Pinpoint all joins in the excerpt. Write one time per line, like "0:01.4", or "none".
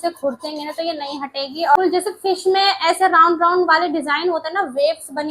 0:01.8